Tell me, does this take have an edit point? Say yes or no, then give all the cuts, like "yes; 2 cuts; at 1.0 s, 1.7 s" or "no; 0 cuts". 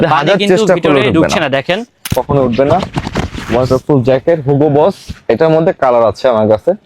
yes; 1 cut; at 2.1 s